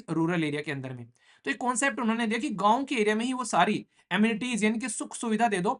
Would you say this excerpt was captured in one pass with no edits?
yes; 0 cuts

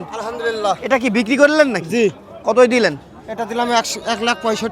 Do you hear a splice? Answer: no; 0 cuts

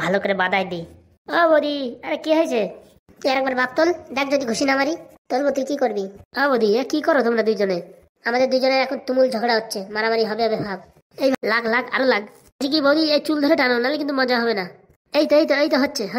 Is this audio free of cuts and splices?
no; 1 cut; at 11.4 s

